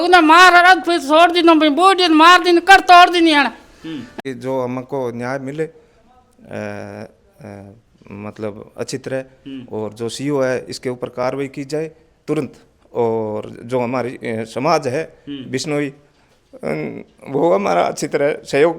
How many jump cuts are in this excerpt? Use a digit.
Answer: 1